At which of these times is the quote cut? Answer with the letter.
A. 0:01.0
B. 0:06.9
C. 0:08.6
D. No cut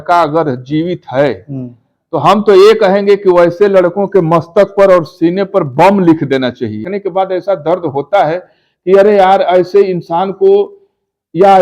B